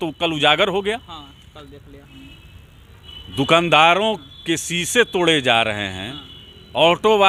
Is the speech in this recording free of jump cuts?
yes; 0 cuts

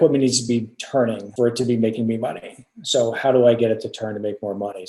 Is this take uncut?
yes; 0 cuts

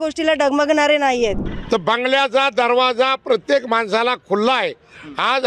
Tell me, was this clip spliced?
yes; 1 cut; at 1.5 s

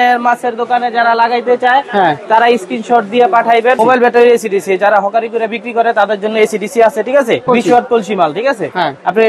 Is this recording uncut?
no; 2 cuts; at 3.8 s, 7.4 s

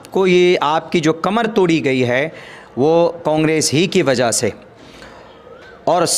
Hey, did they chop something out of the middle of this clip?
no; 0 cuts

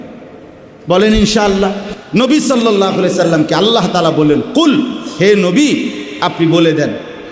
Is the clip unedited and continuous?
no; 1 cut; at 1.9 s

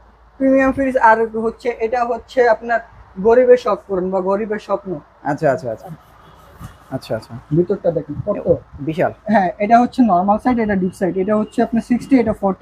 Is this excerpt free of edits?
no; 1 cut; at 5.8 s

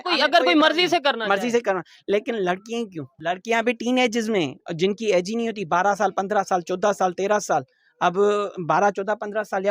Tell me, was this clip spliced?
yes; 1 cut; at 3.1 s

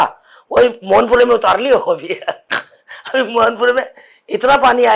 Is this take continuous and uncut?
yes; 0 cuts

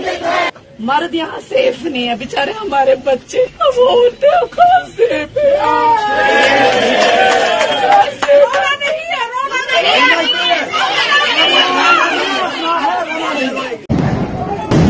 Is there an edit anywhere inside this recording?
no; 0 cuts

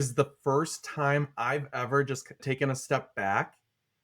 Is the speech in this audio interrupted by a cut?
yes; 1 cut; at 2.4 s

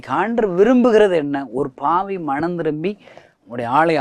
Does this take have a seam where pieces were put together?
no; 0 cuts

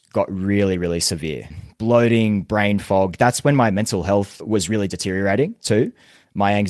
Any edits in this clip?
yes; 2 cuts; at 1.5 s, 4.4 s

